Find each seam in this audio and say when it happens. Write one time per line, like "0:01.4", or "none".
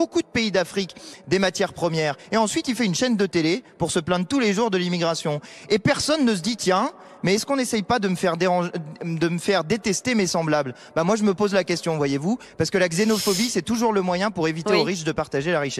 none